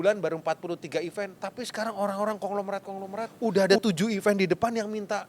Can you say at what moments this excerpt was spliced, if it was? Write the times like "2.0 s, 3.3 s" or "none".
1.4 s, 3.3 s